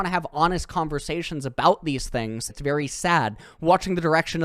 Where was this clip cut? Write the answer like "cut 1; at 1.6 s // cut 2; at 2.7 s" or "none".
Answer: cut 1; at 2.5 s